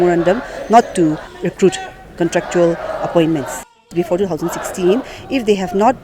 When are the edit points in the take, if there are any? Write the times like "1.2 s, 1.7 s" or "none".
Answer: 1.3 s, 3.9 s

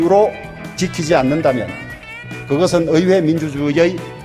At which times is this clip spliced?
none

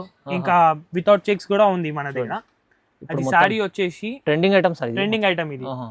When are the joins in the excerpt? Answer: none

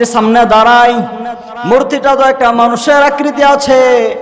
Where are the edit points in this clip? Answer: none

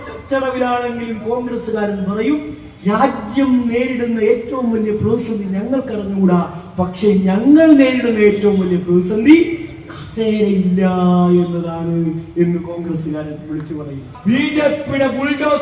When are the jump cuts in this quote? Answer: 14.1 s

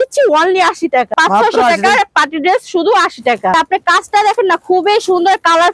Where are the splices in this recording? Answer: 1.1 s, 3.5 s

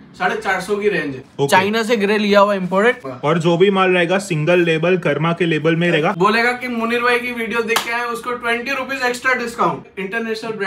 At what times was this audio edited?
1.2 s, 3.1 s, 6.1 s, 9.9 s

